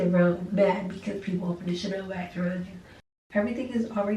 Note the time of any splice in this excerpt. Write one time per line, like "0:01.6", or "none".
0:03.3